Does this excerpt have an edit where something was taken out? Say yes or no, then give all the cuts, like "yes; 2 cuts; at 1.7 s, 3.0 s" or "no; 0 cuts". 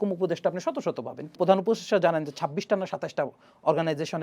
yes; 1 cut; at 1.3 s